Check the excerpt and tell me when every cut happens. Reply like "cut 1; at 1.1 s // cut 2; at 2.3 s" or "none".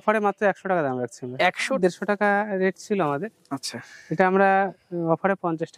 cut 1; at 1.7 s